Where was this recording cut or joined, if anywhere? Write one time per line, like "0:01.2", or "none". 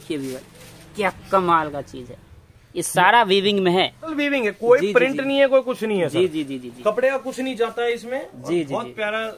0:04.1